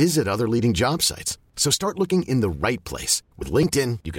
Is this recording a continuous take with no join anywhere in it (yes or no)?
yes